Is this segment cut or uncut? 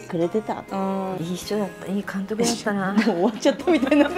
cut